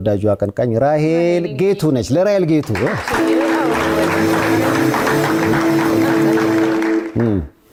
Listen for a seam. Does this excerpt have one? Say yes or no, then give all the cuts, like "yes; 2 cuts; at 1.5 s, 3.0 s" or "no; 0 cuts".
no; 0 cuts